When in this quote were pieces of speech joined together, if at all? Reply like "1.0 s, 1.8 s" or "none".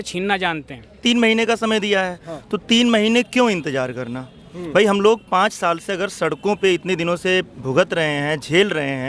1.0 s